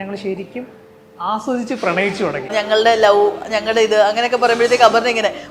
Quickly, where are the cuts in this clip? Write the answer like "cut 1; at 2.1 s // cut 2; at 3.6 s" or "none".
cut 1; at 2.5 s